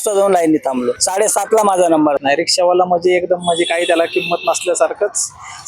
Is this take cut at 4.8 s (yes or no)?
no